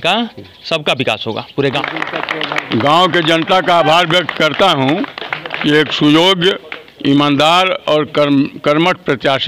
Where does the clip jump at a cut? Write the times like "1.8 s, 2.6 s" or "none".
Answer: 1.8 s